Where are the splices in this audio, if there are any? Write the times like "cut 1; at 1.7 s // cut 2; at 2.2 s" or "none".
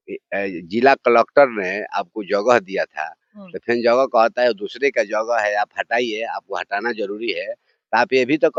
none